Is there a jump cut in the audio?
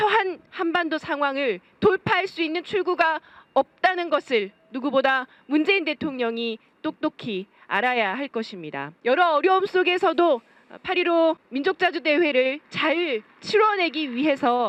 no; 0 cuts

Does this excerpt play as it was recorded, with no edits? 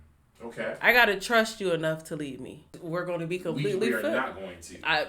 no; 1 cut; at 2.7 s

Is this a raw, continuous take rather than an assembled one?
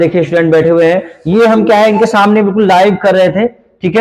yes; 0 cuts

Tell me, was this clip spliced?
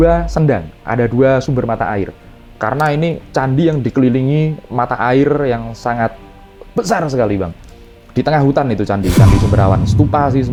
no; 0 cuts

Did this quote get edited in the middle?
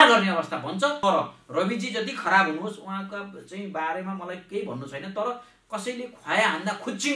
yes; 1 cut; at 1.0 s

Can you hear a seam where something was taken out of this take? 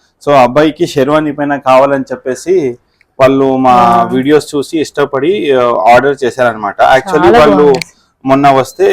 no; 0 cuts

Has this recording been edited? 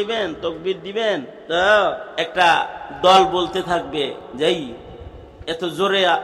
yes; 3 cuts; at 1.3 s, 2.0 s, 4.2 s

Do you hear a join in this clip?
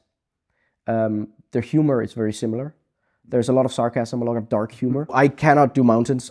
yes; 1 cut; at 5.1 s

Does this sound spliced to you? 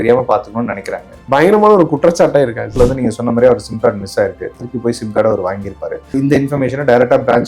yes; 3 cuts; at 1.2 s, 2.7 s, 6.2 s

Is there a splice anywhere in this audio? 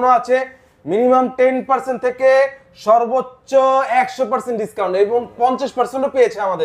no; 0 cuts

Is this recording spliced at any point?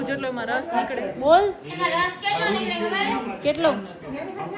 no; 0 cuts

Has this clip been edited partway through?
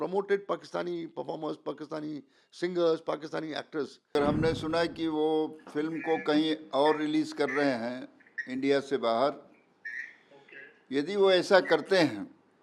yes; 1 cut; at 4.2 s

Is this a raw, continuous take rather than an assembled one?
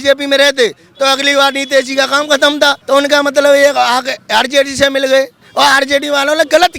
no; 2 cuts; at 2.8 s, 5.4 s

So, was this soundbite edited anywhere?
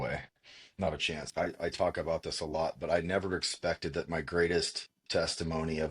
yes; 1 cut; at 1.2 s

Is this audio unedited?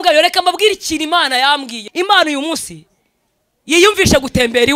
no; 1 cut; at 1.8 s

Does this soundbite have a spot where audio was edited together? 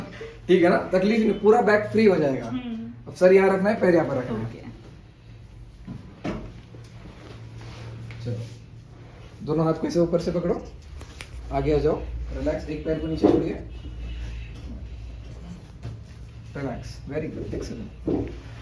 no; 0 cuts

